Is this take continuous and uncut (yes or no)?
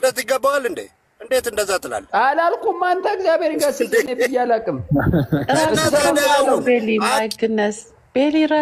yes